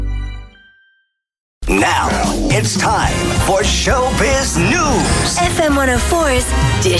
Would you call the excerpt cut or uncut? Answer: cut